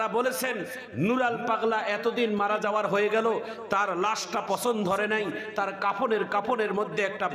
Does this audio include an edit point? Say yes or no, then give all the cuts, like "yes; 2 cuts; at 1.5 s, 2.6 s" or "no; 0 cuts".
no; 0 cuts